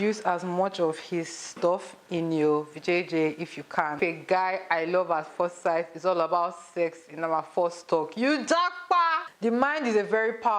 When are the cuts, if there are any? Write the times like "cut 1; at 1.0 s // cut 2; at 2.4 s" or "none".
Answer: cut 1; at 4.0 s // cut 2; at 9.3 s